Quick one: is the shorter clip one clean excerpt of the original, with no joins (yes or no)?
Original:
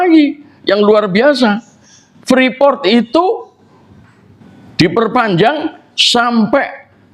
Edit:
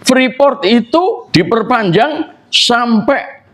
no